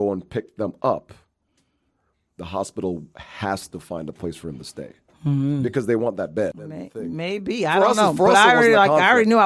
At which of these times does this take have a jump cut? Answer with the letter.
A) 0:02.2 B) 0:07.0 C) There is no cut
B